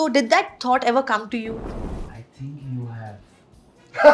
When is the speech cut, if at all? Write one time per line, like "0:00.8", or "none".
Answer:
0:01.7